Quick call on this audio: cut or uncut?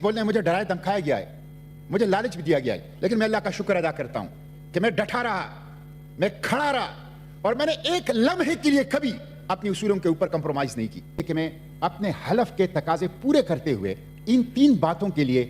cut